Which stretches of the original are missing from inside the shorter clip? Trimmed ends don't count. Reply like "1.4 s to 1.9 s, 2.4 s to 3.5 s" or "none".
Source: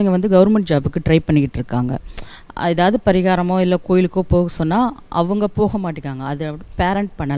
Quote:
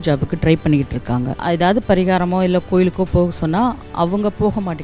2.0 s to 2.5 s